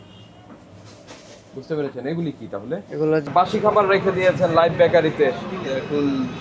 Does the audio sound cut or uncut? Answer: cut